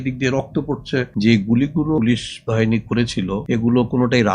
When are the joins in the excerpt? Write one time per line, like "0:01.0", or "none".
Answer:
0:01.1
0:02.0
0:03.4